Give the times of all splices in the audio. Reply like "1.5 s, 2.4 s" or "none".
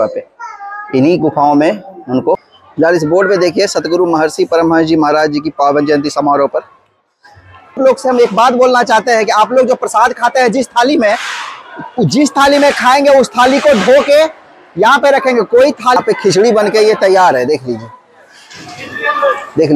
2.6 s, 7.8 s, 16.0 s